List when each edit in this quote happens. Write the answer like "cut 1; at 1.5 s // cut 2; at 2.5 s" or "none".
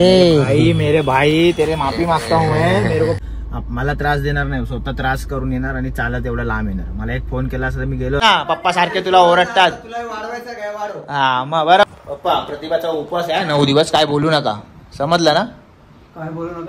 cut 1; at 3.2 s // cut 2; at 8.2 s // cut 3; at 11.9 s